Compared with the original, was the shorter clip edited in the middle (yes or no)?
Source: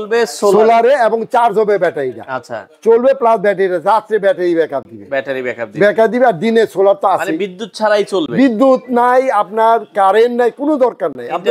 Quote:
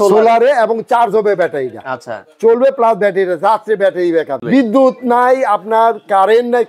yes